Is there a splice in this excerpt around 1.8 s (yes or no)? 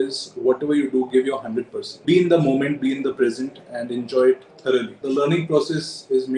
yes